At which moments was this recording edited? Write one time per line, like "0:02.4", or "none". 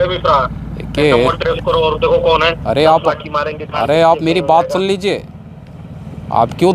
0:02.6